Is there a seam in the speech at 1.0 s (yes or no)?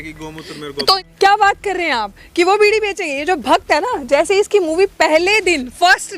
yes